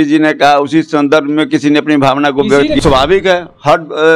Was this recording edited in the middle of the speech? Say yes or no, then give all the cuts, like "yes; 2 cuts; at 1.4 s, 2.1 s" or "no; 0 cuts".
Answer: yes; 1 cut; at 2.8 s